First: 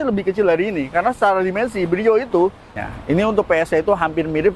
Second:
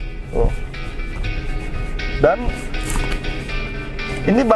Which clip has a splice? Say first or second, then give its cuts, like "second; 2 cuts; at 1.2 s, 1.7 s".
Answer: first; 1 cut; at 2.7 s